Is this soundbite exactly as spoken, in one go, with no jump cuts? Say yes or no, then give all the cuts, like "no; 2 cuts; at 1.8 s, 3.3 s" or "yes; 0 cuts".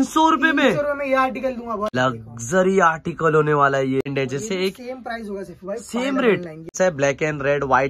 no; 3 cuts; at 1.9 s, 4.1 s, 6.7 s